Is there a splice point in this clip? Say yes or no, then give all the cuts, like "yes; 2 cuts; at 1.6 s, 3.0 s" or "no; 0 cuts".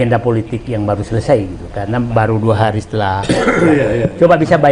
no; 0 cuts